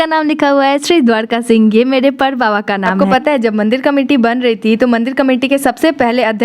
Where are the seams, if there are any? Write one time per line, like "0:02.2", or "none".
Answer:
0:03.0